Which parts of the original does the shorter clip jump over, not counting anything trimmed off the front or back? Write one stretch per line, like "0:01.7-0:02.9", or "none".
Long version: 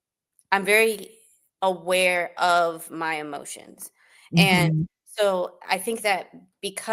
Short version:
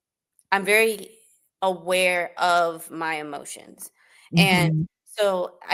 none

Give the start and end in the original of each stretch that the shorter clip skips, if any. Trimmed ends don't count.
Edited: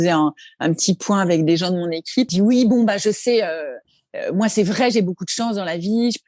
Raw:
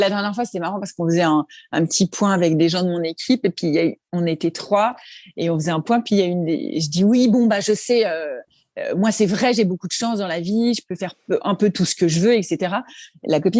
0:03.4-0:06.9

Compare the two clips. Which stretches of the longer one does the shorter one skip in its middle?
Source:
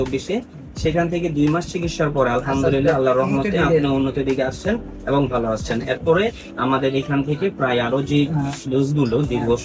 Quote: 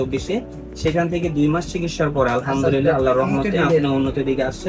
none

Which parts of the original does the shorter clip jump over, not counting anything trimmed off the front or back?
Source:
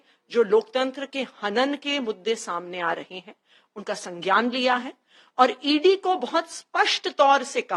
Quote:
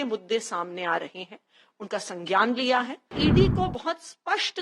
0:05.1-0:05.6

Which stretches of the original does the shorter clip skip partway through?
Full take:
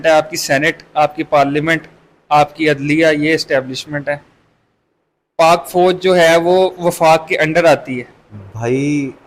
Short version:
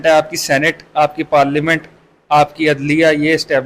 none

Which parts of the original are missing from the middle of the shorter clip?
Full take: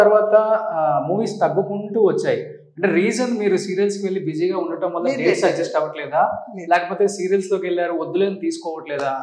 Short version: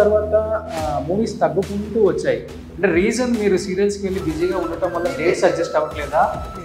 none

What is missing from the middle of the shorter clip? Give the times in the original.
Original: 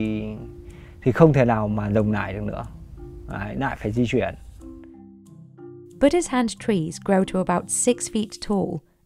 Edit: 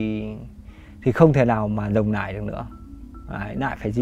none

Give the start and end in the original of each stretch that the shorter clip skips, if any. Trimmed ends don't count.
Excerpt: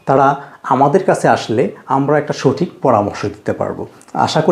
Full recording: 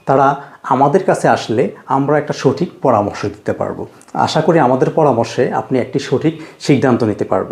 none

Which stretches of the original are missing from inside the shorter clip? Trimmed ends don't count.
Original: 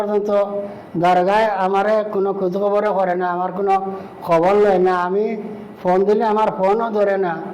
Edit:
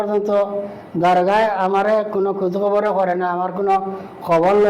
none

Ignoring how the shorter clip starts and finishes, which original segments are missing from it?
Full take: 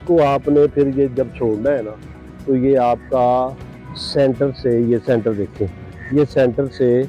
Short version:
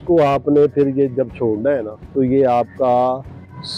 0:02.0-0:02.3

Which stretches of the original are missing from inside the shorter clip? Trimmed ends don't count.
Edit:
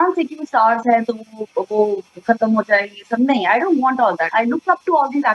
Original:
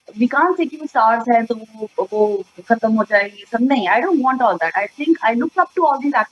0:04.7-0:05.2

